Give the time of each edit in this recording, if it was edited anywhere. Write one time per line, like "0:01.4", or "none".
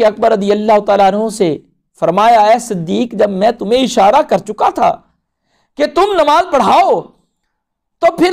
none